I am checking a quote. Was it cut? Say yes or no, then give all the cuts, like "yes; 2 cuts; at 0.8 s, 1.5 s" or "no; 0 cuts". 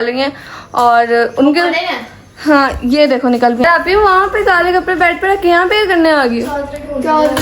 yes; 1 cut; at 3.6 s